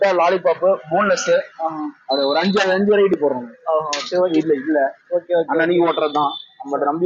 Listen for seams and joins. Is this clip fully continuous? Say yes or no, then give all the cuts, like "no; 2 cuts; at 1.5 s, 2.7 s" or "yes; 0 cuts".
no; 1 cut; at 4.3 s